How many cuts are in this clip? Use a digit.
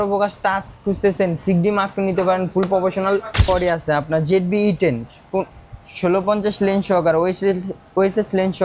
1